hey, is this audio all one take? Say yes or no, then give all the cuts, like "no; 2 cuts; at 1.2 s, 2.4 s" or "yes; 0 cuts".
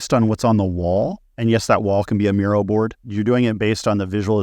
no; 2 cuts; at 1.2 s, 3.1 s